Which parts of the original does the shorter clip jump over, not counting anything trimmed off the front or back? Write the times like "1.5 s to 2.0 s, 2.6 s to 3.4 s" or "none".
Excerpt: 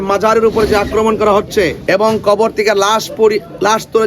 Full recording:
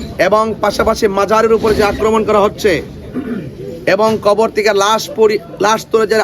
2.9 s to 3.8 s

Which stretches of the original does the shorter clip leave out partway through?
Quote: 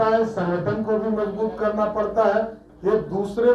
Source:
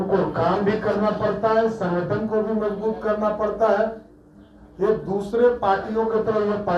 4.1 s to 4.6 s

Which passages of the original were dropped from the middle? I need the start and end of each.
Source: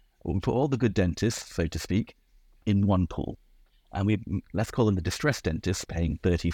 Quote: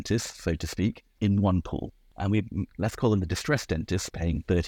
2.2 s to 2.5 s, 3.5 s to 3.8 s

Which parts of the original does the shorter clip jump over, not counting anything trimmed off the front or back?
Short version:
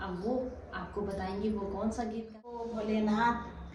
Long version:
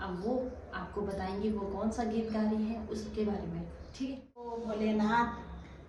2.3 s to 4.2 s

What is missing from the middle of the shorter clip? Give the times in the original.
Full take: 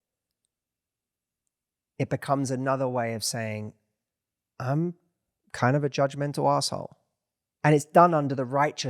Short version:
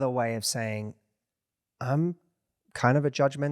none

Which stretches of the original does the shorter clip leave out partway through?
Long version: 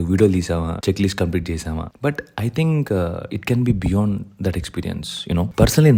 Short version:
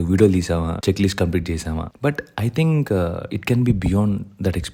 none

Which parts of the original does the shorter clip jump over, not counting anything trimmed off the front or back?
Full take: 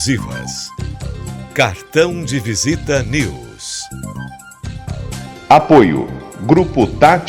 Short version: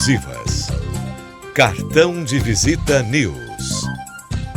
3.5 s to 3.8 s

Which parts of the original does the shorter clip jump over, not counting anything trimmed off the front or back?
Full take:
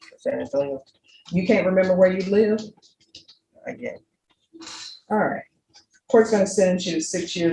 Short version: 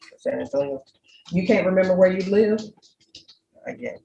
none

